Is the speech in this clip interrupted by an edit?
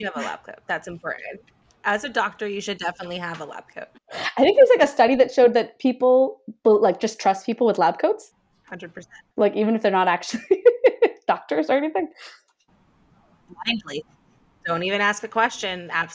no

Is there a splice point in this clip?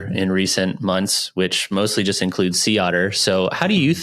no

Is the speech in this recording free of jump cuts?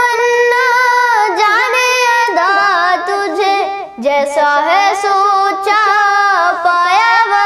yes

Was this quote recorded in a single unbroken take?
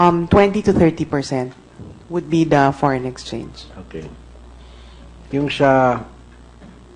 no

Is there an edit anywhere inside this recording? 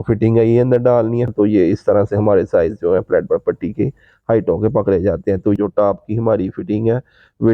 yes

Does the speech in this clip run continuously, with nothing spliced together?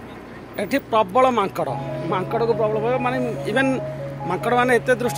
yes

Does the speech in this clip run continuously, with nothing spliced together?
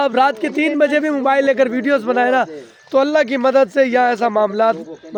yes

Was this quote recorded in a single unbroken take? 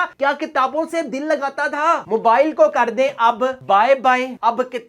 no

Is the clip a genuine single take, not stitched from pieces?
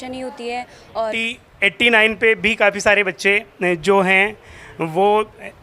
no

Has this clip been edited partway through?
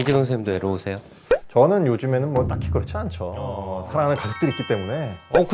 no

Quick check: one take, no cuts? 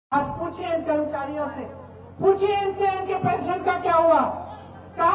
yes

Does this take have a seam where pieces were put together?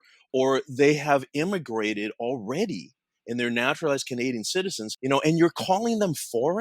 yes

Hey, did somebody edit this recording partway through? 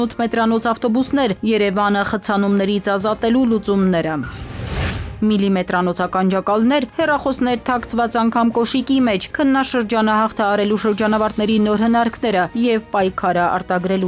no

